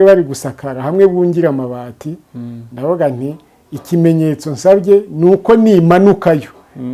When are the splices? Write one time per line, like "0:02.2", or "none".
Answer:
none

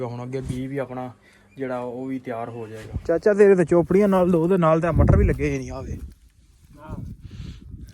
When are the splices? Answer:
0:02.8

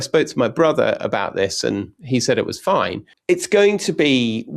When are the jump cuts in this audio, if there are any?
0:03.1

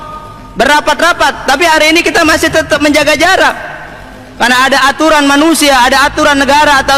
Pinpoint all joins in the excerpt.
none

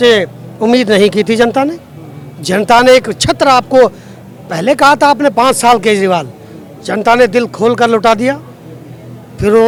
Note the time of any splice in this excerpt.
none

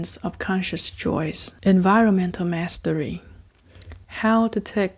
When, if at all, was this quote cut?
0:01.5
0:03.9

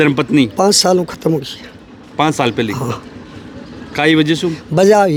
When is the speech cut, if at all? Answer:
none

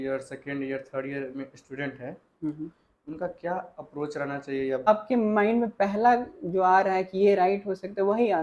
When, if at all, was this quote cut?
0:04.9

